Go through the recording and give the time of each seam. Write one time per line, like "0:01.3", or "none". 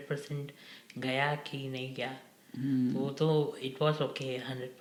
none